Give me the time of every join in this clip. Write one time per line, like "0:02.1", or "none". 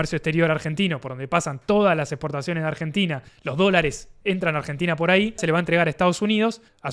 0:05.4